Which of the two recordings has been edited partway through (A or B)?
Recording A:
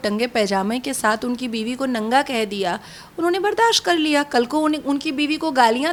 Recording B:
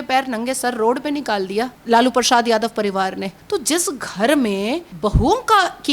B